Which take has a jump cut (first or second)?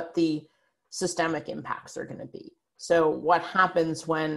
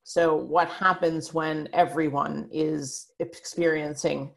second